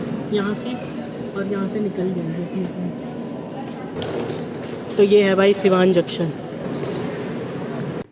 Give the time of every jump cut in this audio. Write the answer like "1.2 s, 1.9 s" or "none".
none